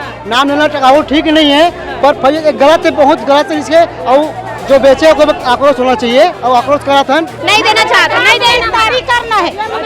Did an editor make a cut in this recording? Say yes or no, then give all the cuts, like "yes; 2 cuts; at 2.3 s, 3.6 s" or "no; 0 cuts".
yes; 1 cut; at 7.4 s